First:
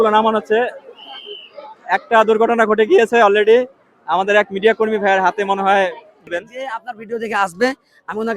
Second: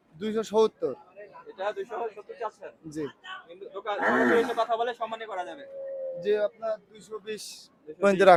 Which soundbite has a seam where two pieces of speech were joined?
first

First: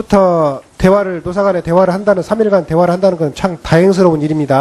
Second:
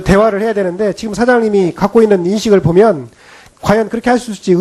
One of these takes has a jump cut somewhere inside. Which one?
second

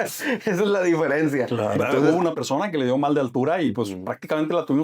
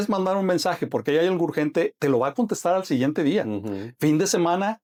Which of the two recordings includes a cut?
first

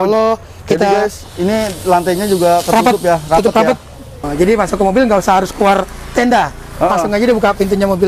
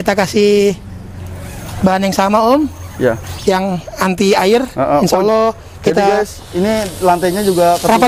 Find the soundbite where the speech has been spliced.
first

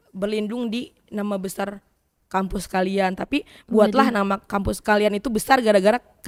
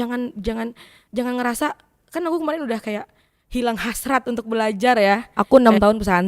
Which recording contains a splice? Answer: second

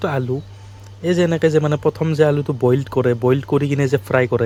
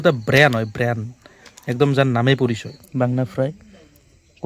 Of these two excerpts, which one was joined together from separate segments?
second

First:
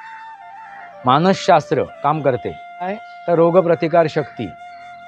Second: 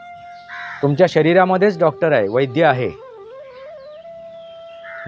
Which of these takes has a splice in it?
first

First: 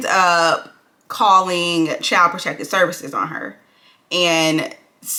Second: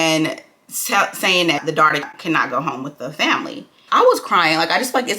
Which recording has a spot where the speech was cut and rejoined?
second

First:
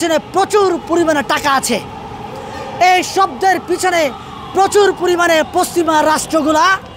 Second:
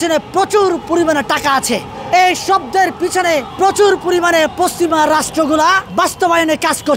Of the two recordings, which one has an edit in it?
second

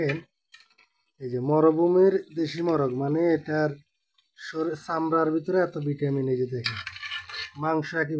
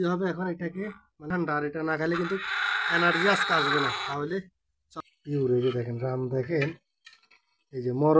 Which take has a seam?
second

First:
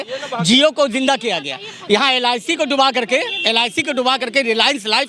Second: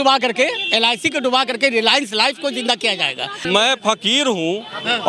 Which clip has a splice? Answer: second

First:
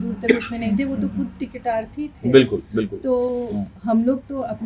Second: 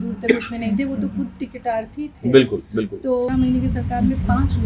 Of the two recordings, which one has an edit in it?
second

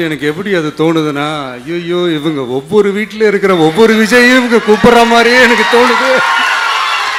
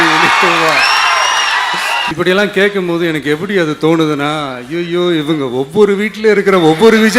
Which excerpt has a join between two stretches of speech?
second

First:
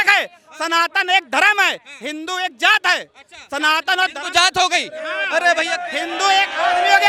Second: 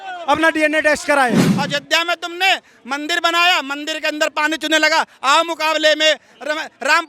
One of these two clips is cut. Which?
second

